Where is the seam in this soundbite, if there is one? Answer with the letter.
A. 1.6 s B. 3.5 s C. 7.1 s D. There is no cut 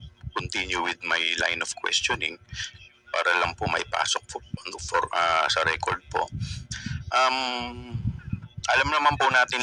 D